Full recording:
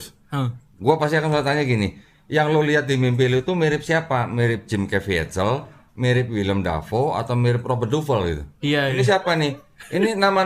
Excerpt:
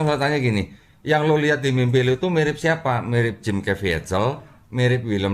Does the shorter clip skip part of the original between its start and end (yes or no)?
no